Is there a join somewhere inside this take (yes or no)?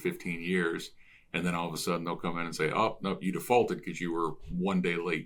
no